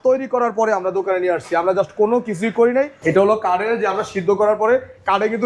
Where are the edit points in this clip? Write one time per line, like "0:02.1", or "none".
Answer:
0:03.0